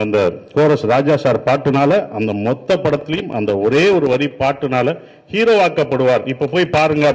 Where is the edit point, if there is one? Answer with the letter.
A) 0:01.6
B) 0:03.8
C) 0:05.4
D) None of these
D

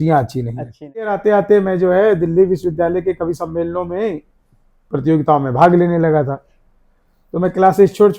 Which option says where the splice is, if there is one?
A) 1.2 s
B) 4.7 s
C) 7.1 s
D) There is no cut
A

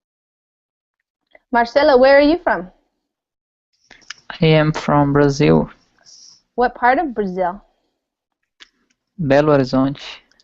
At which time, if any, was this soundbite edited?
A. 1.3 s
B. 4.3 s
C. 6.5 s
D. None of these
C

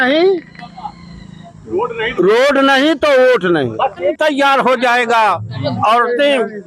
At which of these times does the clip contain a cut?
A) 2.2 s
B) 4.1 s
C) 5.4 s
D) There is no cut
B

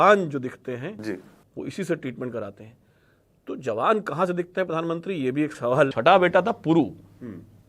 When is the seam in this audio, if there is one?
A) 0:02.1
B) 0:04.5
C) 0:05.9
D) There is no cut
C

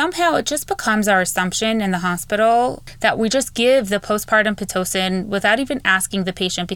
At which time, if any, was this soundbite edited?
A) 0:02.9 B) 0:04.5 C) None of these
A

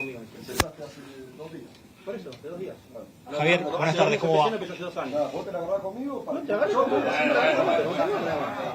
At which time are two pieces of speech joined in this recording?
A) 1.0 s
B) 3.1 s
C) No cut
C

